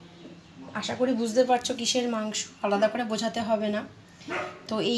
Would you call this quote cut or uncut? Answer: uncut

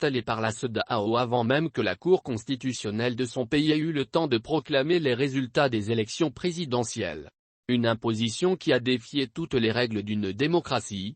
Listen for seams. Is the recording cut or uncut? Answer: cut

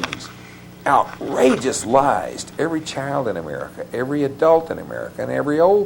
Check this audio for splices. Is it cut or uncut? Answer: uncut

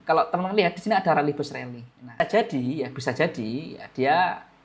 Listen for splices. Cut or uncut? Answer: cut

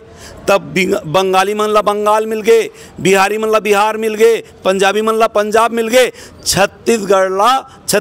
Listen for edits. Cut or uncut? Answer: uncut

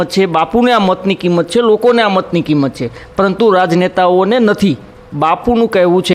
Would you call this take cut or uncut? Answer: uncut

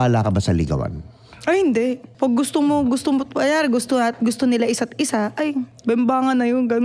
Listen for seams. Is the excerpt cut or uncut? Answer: cut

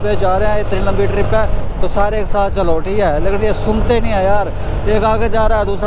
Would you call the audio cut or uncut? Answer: uncut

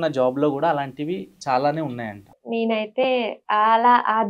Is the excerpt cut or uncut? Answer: cut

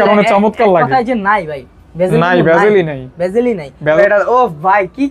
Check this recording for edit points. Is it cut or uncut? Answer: cut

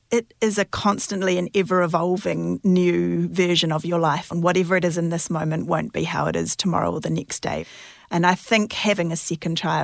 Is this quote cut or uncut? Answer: cut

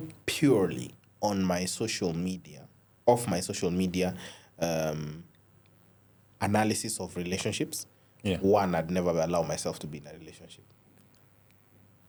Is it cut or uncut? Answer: uncut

